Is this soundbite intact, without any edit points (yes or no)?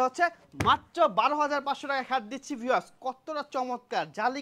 yes